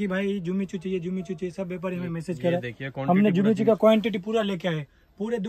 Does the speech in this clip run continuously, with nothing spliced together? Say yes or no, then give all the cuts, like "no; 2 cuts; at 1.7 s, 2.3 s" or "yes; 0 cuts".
yes; 0 cuts